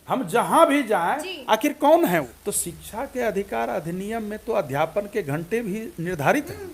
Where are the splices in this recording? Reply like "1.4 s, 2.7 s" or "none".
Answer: 2.3 s